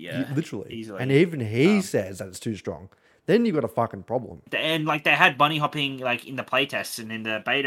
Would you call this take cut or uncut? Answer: cut